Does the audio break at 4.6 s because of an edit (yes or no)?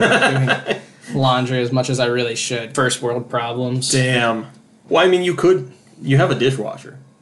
no